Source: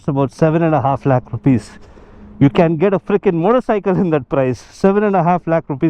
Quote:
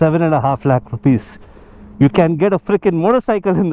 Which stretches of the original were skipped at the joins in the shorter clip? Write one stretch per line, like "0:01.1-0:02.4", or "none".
none

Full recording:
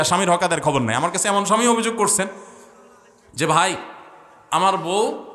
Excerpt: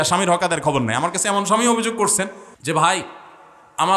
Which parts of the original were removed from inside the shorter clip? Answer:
0:02.5-0:03.2

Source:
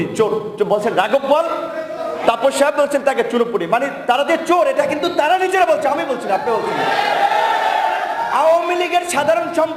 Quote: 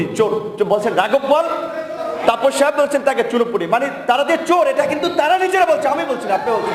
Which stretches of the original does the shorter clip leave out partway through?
none

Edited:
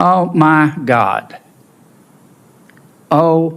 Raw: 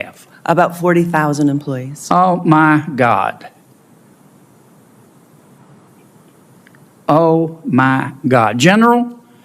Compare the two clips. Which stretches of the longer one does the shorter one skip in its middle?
0:04.8-0:06.6

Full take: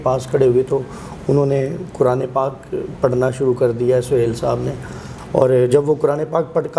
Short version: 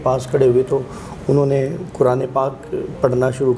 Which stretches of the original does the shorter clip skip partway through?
none

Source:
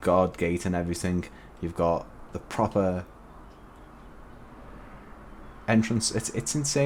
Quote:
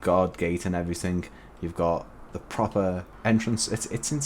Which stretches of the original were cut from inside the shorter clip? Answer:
0:03.1-0:05.5

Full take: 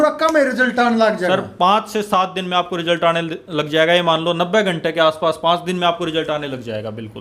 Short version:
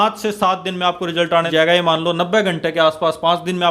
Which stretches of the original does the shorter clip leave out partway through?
0:03.2-0:03.7

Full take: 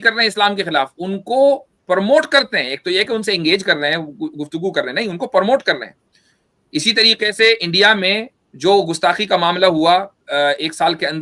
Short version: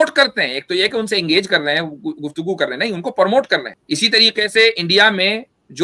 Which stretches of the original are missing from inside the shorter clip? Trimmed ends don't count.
0:05.9-0:06.6

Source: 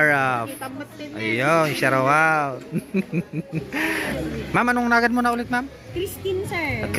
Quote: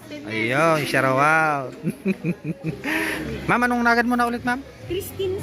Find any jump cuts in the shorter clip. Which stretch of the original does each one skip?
0:04.0-0:04.2

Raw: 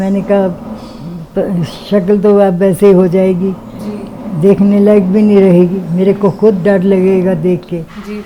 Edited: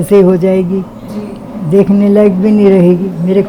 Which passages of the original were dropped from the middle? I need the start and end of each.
none

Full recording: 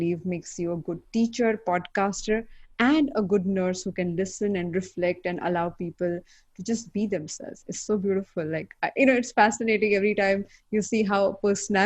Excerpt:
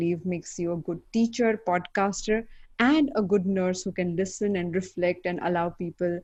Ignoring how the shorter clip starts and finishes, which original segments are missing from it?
none

